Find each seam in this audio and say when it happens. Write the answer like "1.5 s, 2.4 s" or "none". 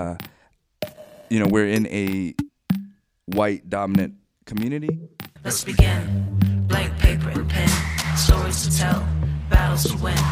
5.3 s